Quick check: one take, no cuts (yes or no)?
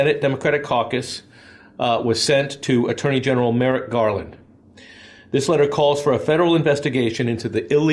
yes